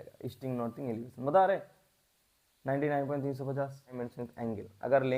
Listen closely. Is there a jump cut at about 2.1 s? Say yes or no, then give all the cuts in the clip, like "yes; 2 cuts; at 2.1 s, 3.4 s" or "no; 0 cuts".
no; 1 cut; at 3.9 s